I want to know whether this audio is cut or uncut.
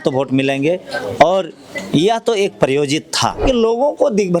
cut